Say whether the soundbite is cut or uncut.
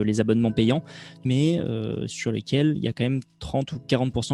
cut